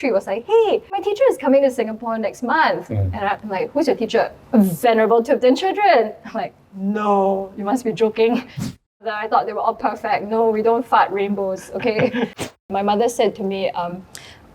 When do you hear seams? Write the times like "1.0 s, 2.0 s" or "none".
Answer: 1.0 s, 4.4 s, 8.8 s, 12.4 s